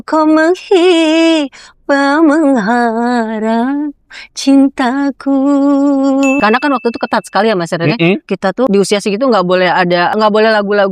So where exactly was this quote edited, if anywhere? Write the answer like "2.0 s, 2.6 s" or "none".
6.4 s, 8.5 s, 10.1 s